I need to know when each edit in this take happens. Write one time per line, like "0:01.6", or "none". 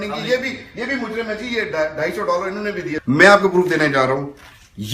0:02.9